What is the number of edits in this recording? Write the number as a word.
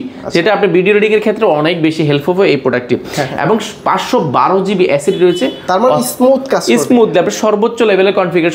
zero